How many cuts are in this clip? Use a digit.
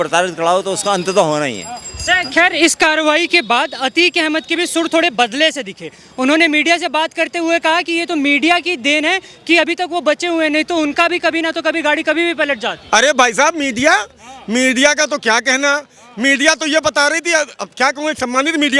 0